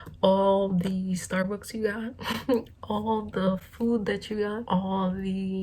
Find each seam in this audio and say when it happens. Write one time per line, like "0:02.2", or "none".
0:04.6